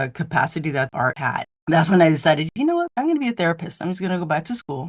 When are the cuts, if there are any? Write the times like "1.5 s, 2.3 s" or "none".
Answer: 1.0 s, 2.6 s